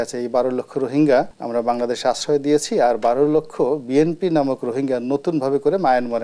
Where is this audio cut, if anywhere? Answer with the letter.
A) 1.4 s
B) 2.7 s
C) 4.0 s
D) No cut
A